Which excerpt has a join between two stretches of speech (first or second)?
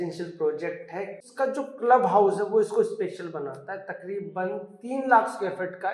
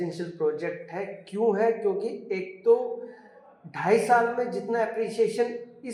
first